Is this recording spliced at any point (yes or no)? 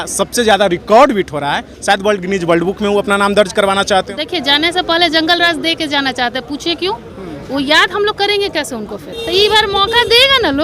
yes